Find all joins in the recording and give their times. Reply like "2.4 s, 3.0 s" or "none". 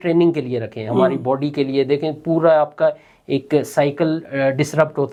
none